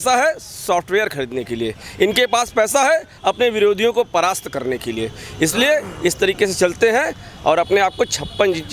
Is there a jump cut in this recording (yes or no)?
no